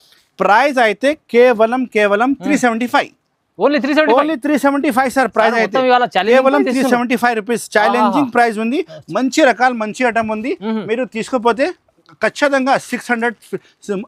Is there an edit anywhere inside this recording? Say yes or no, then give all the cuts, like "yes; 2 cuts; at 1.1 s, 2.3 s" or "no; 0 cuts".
no; 0 cuts